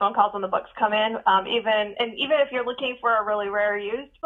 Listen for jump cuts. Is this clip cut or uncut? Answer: uncut